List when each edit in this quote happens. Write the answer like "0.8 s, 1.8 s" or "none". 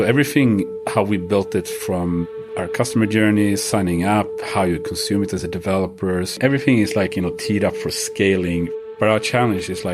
6.4 s, 8.7 s